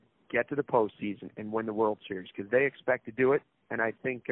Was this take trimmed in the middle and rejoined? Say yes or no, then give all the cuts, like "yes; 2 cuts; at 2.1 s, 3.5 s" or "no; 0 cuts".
no; 0 cuts